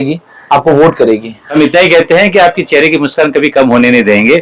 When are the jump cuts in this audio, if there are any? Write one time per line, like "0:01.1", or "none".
0:01.4